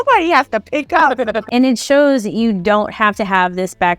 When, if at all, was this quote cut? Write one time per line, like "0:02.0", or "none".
0:01.4